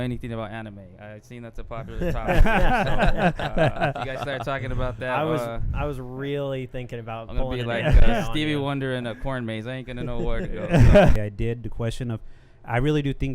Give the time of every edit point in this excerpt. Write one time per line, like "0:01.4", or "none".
0:11.1